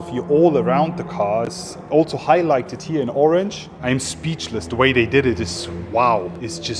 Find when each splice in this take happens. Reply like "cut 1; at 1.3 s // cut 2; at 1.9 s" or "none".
none

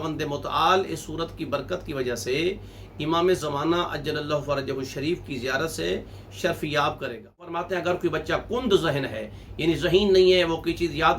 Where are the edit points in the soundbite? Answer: cut 1; at 7.6 s

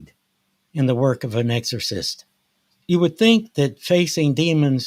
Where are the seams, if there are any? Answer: none

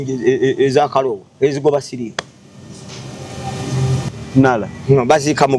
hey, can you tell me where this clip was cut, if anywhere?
cut 1; at 4.1 s

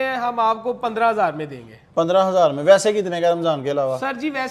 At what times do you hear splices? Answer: none

